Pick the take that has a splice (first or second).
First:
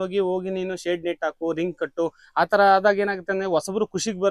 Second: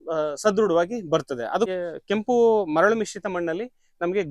second